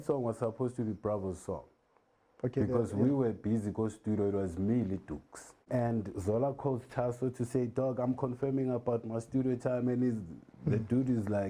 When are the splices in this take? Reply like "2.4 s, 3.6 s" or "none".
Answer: 5.7 s